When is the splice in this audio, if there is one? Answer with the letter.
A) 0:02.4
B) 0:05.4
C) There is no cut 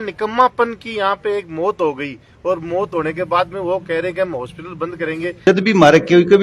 B